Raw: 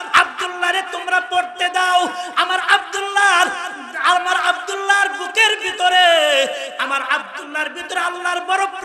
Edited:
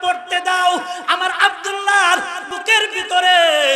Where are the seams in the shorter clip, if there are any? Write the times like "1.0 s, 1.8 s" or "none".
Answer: 2.5 s